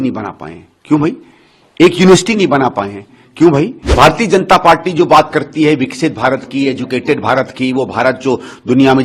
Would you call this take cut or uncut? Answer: cut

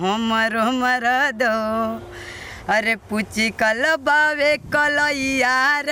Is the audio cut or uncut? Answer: uncut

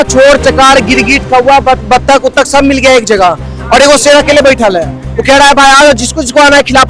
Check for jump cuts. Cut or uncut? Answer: uncut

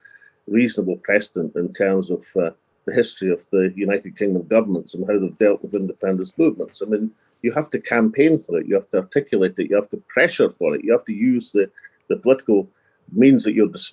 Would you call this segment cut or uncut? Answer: uncut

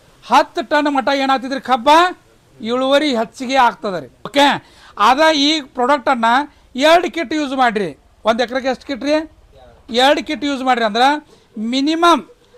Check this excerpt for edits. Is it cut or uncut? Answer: uncut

